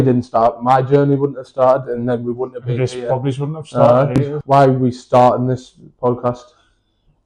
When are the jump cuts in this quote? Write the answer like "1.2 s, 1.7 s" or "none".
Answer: 4.3 s